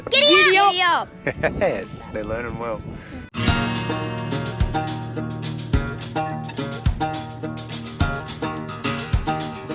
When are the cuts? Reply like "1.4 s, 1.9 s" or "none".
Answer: none